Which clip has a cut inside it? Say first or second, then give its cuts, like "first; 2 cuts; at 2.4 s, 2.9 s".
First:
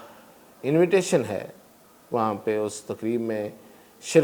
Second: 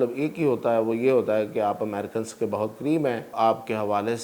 second; 1 cut; at 3.3 s